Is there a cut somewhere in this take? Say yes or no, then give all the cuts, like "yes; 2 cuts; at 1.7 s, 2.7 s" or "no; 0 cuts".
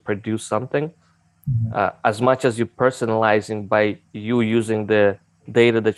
no; 0 cuts